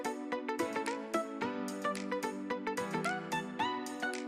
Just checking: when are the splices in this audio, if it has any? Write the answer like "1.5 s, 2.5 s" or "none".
none